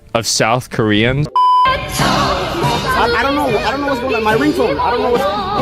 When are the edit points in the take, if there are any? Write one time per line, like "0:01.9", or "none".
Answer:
0:01.6